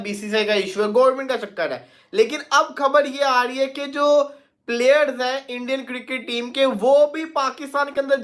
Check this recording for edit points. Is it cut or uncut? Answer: uncut